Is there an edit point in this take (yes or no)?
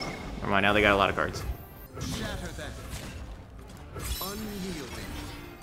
yes